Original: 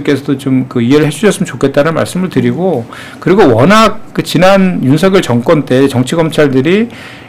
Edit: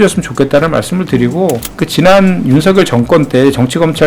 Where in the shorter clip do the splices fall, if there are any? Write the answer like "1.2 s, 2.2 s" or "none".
1.7 s